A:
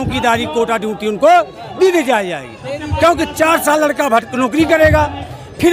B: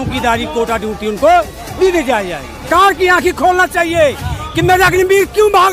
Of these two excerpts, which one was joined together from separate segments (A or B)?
B